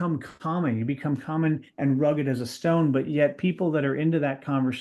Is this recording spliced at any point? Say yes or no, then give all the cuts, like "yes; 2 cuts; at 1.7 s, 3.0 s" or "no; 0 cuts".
no; 0 cuts